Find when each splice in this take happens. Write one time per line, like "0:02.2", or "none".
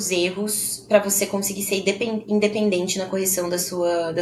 none